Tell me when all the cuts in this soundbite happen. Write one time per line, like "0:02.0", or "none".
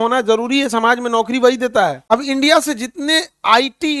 0:02.0